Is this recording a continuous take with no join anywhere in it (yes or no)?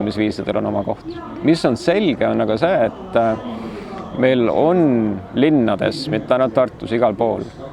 yes